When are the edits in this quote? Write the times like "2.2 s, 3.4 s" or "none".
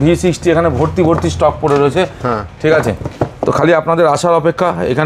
none